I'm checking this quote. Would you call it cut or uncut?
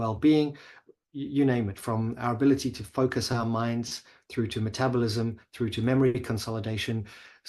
uncut